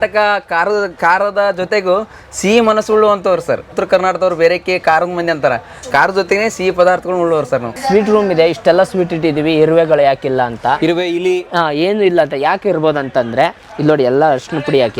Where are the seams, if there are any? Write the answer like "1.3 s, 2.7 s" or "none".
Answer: 3.7 s, 7.7 s

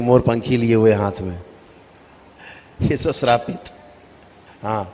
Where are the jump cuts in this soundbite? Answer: none

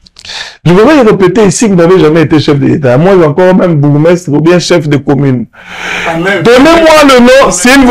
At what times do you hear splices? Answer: 5.5 s

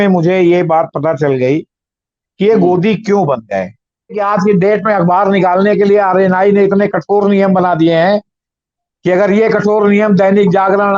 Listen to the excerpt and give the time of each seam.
4.2 s

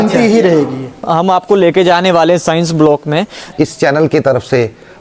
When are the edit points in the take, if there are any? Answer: 1.0 s, 3.4 s

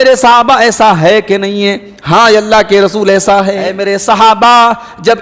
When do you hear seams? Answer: 3.8 s

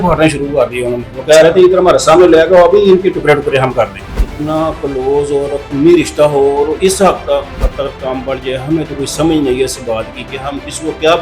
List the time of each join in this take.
1.0 s

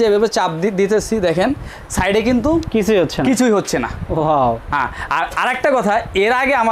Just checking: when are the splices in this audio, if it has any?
none

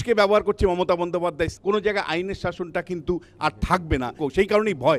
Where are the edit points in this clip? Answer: 1.5 s, 4.2 s

